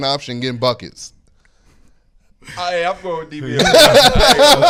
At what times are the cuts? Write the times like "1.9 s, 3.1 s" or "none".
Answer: none